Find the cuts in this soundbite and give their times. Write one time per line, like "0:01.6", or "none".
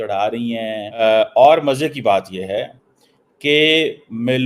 0:01.0